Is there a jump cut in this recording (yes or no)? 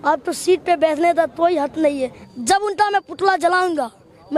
yes